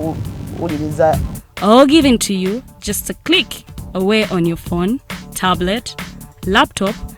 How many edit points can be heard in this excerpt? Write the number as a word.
zero